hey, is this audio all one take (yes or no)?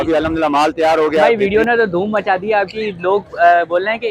no